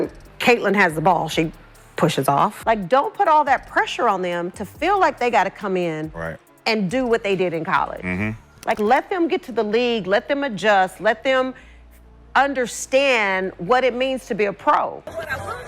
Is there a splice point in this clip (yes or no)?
no